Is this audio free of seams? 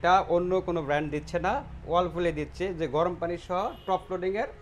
yes; 0 cuts

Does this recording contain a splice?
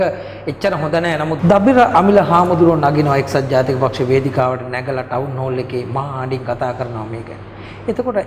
yes; 1 cut; at 1.4 s

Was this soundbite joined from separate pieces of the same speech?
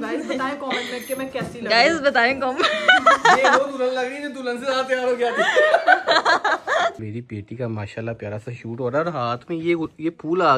yes; 1 cut; at 7.0 s

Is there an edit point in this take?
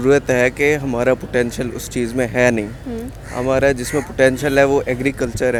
no; 0 cuts

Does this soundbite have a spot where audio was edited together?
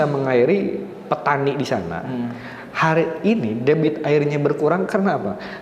no; 0 cuts

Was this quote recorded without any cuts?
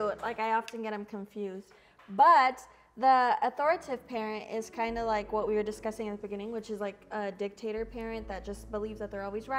yes; 0 cuts

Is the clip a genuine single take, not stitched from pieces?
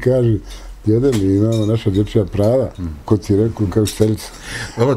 yes; 0 cuts

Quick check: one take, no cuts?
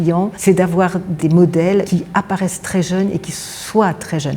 no; 2 cuts; at 1.1 s, 1.9 s

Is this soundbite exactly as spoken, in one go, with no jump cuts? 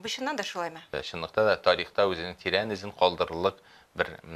no; 1 cut; at 0.9 s

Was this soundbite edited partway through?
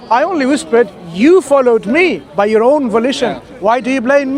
no; 0 cuts

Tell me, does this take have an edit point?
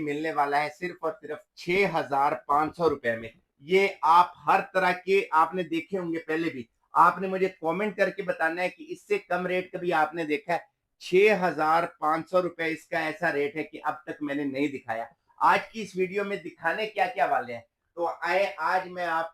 no; 0 cuts

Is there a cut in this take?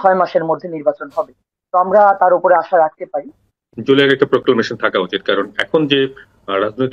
yes; 1 cut; at 3.7 s

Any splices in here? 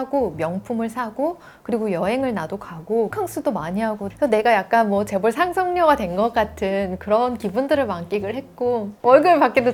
no; 0 cuts

